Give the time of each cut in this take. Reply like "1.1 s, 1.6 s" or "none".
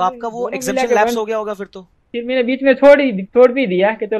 2.0 s